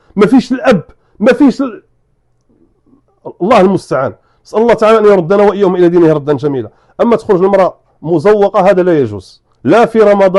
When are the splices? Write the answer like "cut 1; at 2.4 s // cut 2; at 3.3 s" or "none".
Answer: none